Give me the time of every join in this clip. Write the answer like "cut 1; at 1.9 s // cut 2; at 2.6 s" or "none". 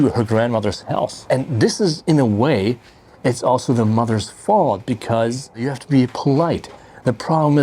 cut 1; at 1.2 s // cut 2; at 5.7 s